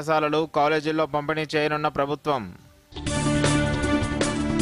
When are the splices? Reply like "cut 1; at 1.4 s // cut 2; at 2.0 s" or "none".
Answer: none